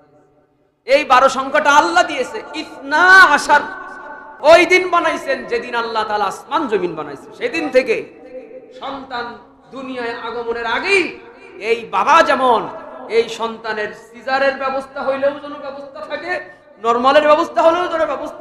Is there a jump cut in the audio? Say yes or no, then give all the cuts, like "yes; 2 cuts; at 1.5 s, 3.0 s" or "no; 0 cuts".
yes; 1 cut; at 4.2 s